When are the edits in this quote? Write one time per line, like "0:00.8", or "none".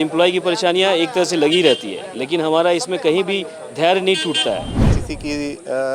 0:04.9